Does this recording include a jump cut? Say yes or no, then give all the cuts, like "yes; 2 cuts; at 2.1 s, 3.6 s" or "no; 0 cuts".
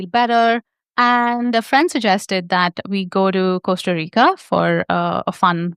no; 0 cuts